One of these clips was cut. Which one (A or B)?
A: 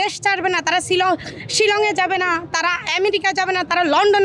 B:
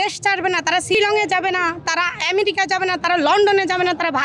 B